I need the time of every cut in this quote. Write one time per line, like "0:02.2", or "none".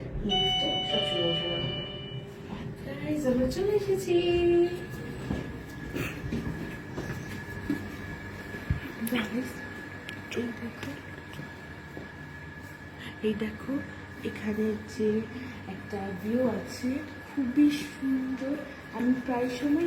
none